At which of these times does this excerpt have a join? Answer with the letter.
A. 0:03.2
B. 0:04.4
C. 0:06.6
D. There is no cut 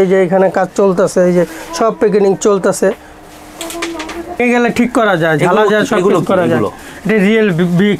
B